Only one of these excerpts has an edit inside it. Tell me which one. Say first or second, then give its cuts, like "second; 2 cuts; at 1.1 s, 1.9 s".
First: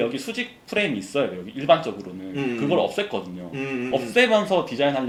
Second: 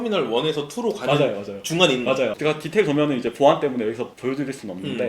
second; 1 cut; at 2.4 s